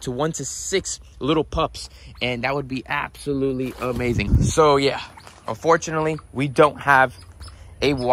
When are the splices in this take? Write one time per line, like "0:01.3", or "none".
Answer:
0:04.2